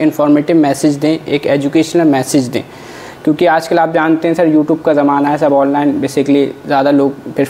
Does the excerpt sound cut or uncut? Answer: uncut